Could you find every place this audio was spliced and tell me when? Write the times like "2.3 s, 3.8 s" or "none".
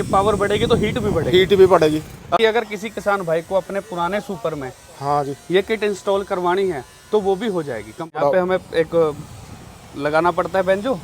2.4 s, 8.0 s